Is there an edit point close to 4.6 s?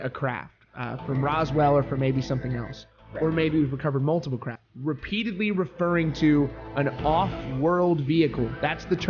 yes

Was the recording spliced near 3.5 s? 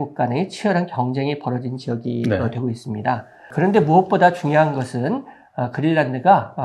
yes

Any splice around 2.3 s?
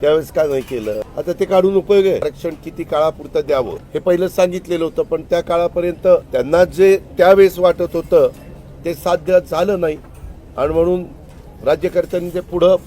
yes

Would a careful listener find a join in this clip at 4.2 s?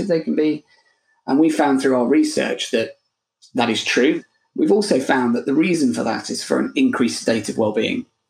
yes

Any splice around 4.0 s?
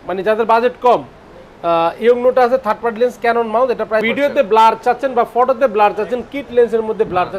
yes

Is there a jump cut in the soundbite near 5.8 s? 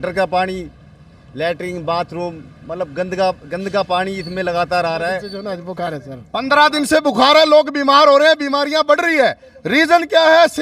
yes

